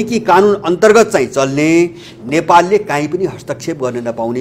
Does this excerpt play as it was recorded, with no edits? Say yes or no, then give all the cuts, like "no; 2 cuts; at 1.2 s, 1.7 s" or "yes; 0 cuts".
yes; 0 cuts